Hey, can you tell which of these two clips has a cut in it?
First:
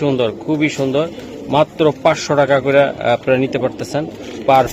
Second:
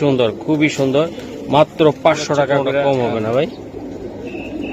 second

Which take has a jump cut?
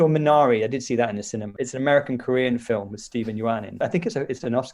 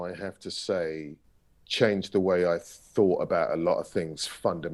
first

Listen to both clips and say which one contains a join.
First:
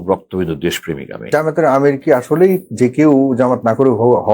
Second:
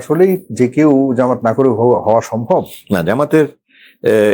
first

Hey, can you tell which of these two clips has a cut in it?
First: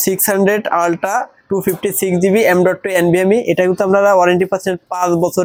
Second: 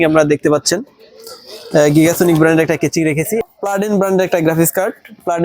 second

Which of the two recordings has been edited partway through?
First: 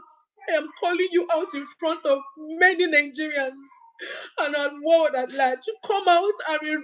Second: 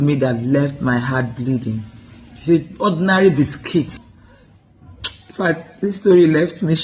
second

